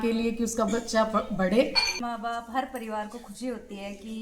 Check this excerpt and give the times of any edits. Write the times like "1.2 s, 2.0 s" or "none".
1.9 s